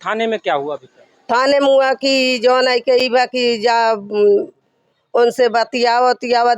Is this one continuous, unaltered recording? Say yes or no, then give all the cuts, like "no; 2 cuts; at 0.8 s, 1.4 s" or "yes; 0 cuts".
yes; 0 cuts